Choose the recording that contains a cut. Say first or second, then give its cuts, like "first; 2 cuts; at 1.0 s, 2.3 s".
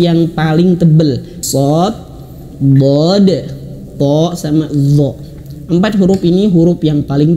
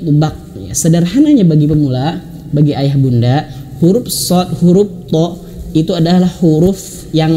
first; 1 cut; at 1.4 s